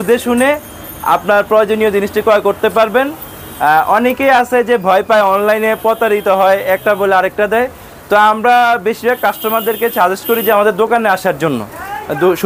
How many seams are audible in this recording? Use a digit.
0